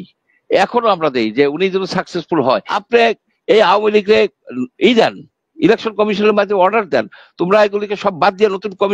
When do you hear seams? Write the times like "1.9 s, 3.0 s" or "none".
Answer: 2.7 s